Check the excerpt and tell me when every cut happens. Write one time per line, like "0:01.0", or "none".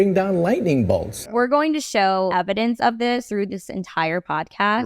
0:01.1
0:02.3
0:03.3